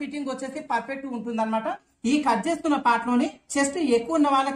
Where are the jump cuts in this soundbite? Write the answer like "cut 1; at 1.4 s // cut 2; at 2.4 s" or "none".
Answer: cut 1; at 1.9 s